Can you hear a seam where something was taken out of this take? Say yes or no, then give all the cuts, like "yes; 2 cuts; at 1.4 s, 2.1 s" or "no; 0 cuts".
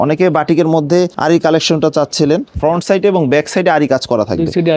yes; 2 cuts; at 1.1 s, 2.5 s